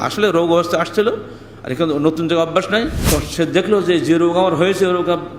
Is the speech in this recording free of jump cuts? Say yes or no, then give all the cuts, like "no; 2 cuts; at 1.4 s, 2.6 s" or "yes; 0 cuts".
no; 1 cut; at 3.0 s